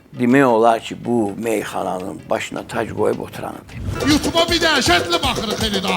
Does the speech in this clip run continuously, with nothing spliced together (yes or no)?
no